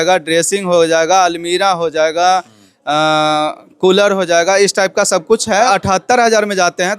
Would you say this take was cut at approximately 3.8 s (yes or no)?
no